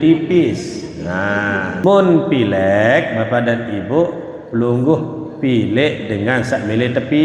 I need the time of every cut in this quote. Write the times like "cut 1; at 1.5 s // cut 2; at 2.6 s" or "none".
cut 1; at 1.8 s